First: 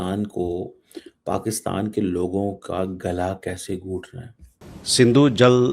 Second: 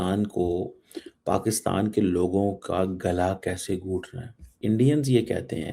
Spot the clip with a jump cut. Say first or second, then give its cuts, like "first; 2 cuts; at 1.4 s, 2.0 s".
first; 1 cut; at 4.6 s